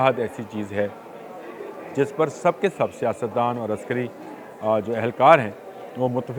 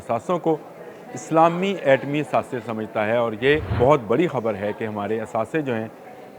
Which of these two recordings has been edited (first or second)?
second